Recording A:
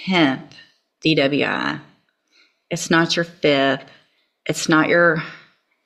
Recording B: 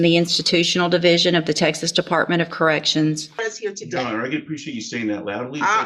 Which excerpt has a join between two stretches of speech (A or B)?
B